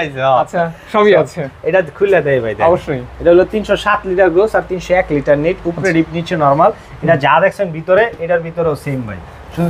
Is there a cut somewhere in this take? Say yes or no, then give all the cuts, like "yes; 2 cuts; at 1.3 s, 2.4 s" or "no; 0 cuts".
no; 0 cuts